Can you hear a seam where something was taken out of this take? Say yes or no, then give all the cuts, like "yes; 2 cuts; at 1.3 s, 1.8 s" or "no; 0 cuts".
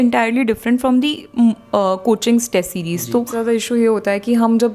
yes; 1 cut; at 3.3 s